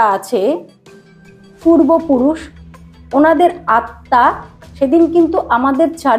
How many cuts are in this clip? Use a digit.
0